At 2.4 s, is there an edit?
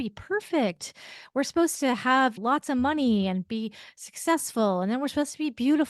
yes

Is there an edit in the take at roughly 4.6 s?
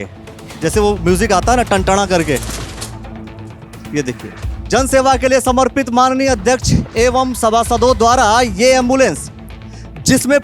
yes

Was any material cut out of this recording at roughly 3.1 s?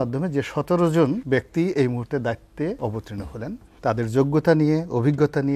yes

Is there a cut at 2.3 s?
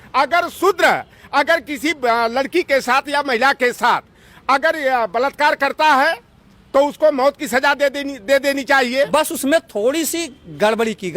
no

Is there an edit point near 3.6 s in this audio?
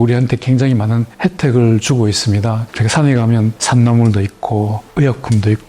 yes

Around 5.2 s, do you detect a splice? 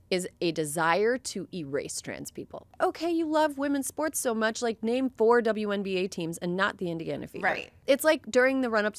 no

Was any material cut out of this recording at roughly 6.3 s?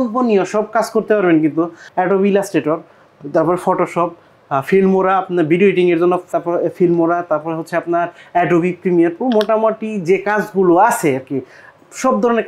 no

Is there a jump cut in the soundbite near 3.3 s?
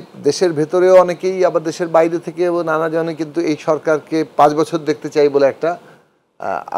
no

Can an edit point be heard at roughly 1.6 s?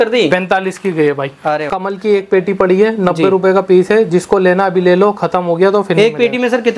yes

